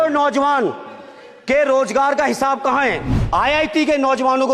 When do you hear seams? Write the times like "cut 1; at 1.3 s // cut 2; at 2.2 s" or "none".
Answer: cut 1; at 3.1 s